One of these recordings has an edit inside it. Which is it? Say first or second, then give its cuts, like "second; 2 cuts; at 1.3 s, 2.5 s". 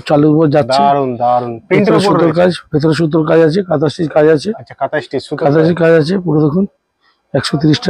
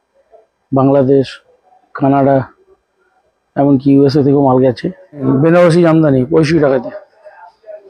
second; 1 cut; at 5.2 s